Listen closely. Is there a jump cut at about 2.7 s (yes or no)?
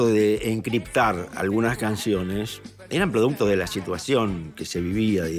no